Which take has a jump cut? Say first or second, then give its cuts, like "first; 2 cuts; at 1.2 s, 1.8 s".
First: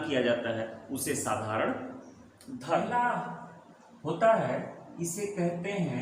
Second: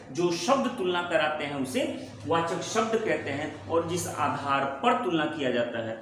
first; 1 cut; at 2.7 s